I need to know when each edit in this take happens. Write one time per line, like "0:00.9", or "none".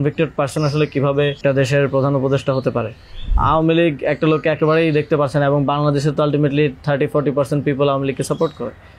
0:01.4
0:03.3